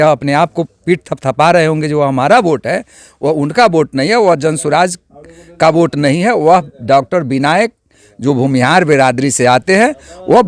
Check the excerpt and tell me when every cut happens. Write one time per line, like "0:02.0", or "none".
none